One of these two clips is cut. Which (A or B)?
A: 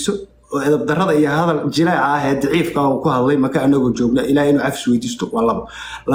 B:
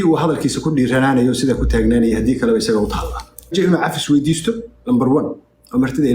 B